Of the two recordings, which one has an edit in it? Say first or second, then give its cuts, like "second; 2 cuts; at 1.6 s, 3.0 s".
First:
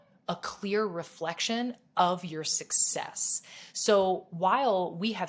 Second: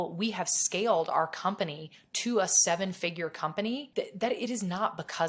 second; 1 cut; at 3.9 s